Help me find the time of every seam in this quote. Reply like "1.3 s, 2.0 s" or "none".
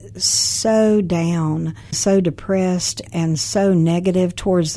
2.0 s